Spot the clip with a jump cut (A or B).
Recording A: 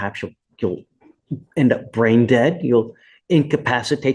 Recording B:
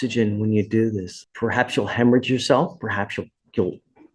B